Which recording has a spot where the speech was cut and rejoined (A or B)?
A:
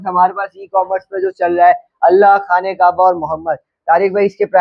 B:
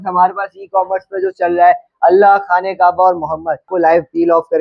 B